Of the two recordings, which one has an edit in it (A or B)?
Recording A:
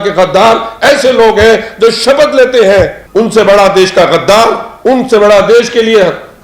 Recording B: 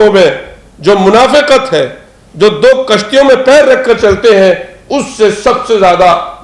A